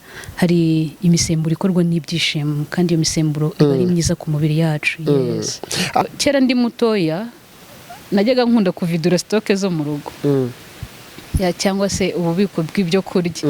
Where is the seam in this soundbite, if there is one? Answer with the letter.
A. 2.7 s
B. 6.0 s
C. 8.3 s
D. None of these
B